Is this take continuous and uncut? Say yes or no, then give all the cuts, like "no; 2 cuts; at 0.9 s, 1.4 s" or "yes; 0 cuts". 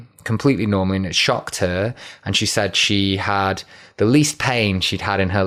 yes; 0 cuts